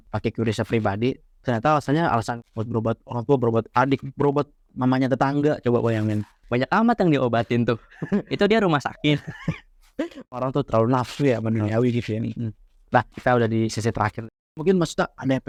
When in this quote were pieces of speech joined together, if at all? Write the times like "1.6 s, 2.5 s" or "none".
none